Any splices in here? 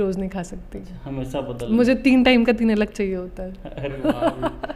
no; 0 cuts

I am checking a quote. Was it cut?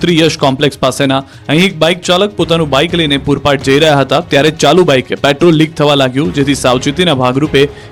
no; 0 cuts

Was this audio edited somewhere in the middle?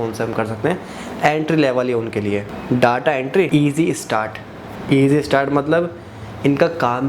yes; 2 cuts; at 2.5 s, 3.5 s

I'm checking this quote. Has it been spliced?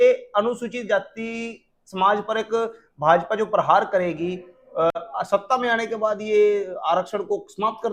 no; 0 cuts

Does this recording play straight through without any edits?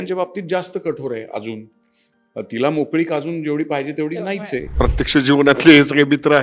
no; 1 cut; at 4.7 s

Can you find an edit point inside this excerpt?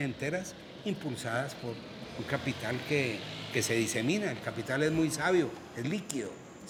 no; 0 cuts

